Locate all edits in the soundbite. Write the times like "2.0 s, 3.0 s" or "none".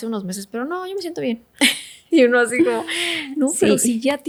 none

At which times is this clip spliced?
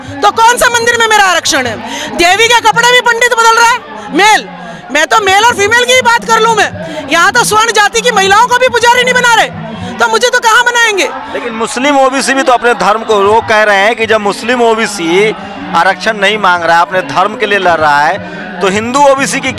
none

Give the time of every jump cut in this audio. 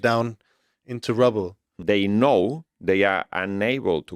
1.8 s

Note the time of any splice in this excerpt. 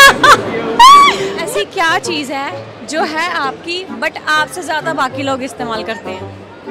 1.3 s

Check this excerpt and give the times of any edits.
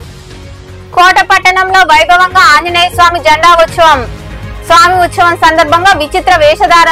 none

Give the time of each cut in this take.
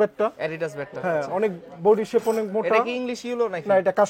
none

